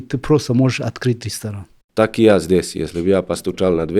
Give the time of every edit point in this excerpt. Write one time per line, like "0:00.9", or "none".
0:01.8